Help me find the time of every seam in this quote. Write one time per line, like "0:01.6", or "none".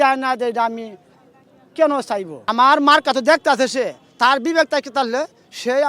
0:02.3